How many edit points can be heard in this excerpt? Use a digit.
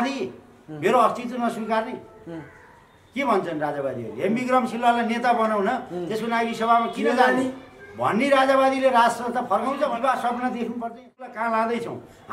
1